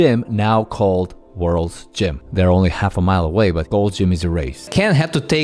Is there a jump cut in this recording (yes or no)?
yes